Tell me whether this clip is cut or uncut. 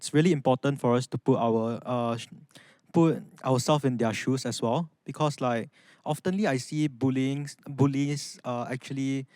uncut